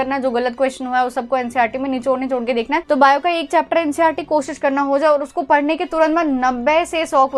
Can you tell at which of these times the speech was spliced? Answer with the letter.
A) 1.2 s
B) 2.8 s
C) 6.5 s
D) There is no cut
B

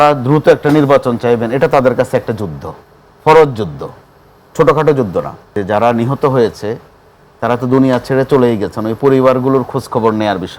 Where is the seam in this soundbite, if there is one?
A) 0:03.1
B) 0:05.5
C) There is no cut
B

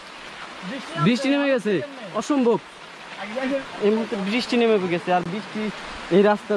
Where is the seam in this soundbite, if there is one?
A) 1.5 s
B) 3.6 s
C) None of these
B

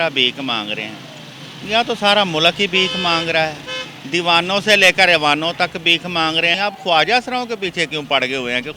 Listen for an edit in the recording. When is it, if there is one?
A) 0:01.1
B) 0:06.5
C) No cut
B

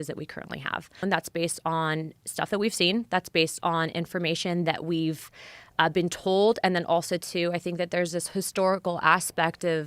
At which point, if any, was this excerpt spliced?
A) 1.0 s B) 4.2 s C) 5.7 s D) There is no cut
A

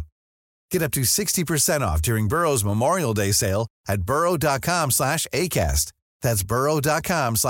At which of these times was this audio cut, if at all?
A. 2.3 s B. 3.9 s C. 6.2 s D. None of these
D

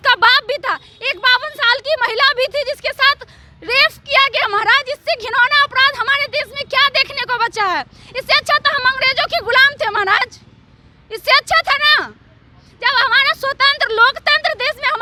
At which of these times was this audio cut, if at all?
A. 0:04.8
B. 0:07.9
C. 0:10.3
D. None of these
D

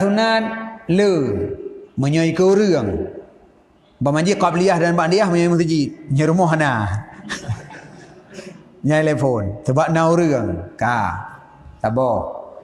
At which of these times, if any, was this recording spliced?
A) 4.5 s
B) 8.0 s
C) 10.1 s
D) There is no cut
D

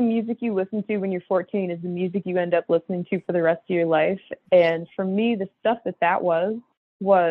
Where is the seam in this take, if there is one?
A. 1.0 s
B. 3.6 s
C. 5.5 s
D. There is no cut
D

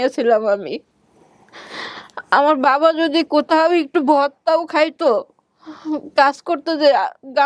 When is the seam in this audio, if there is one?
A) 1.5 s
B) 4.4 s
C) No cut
C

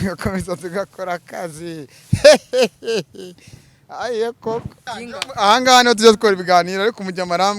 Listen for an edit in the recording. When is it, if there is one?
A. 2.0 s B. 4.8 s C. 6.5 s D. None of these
B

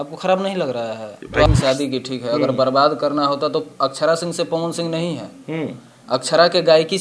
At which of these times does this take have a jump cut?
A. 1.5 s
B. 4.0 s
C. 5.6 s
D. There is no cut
A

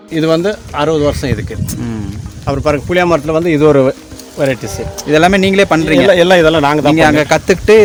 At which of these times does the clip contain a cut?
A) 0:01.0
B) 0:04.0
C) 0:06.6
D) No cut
D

